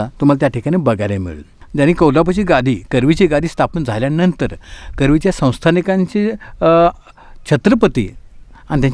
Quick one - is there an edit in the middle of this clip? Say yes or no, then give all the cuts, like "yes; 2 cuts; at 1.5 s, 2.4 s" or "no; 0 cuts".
yes; 1 cut; at 1.6 s